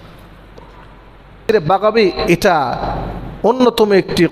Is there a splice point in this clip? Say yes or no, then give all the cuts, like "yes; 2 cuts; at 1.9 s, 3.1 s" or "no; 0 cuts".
yes; 1 cut; at 1.5 s